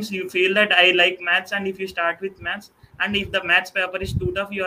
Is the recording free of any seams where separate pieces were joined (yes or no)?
yes